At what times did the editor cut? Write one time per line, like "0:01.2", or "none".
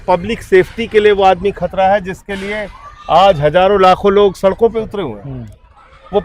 none